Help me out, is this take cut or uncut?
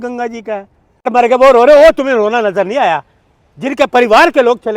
cut